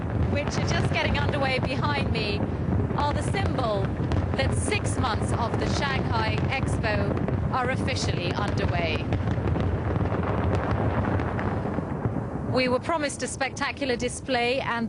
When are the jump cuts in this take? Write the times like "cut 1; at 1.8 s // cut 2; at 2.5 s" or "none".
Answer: cut 1; at 10.4 s